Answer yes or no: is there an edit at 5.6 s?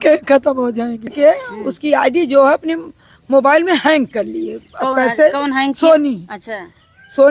no